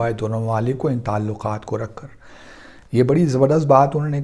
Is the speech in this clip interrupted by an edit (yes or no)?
no